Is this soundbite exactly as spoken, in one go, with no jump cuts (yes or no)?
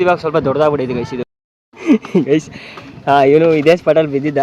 no